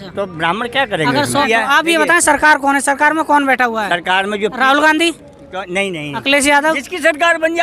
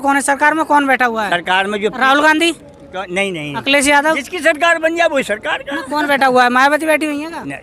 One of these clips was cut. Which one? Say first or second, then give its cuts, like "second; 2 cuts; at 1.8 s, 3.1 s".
first; 1 cut; at 1.4 s